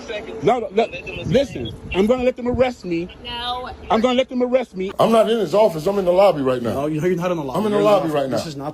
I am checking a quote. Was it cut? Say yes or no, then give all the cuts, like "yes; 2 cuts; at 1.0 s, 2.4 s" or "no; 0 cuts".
yes; 1 cut; at 4.8 s